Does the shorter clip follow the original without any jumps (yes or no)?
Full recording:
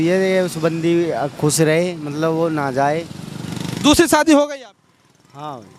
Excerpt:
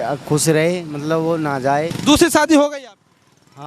no